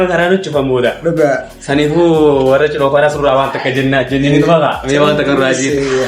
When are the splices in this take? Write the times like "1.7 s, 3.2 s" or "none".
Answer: none